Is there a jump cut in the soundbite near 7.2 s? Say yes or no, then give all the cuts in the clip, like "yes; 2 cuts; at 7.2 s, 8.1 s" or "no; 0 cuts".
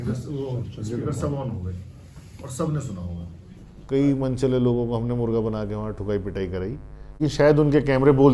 yes; 2 cuts; at 3.4 s, 7.2 s